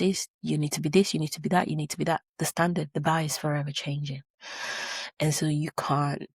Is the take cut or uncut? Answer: uncut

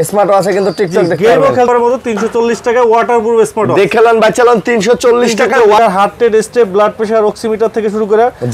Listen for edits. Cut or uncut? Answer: cut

